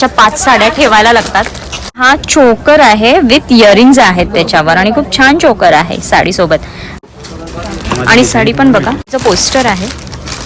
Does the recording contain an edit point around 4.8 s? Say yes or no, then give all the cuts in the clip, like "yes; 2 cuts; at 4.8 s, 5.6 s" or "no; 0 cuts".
no; 3 cuts; at 2.0 s, 6.9 s, 9.2 s